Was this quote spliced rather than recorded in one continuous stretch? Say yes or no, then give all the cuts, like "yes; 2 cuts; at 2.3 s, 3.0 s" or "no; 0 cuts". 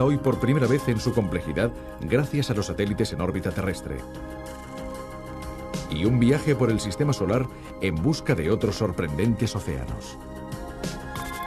yes; 1 cut; at 4.8 s